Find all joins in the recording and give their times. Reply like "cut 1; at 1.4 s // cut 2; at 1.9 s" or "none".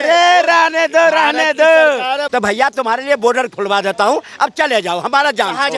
cut 1; at 2.2 s